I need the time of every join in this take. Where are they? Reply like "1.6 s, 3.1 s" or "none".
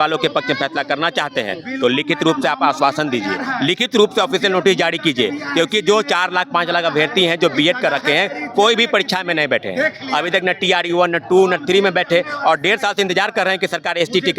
none